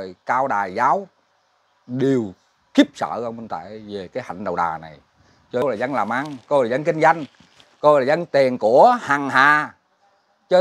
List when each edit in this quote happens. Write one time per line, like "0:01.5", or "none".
0:05.6